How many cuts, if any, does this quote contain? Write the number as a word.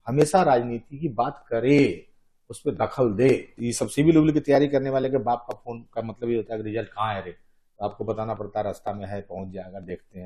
one